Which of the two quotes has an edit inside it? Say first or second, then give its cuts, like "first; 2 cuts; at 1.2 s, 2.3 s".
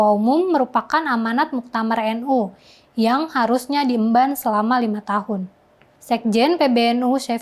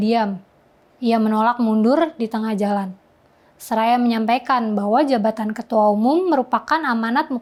first; 1 cut; at 5.9 s